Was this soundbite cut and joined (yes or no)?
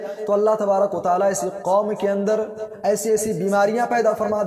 no